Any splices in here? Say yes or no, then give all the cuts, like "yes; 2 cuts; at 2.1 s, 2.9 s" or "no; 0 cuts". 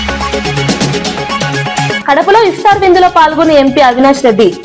yes; 1 cut; at 2.0 s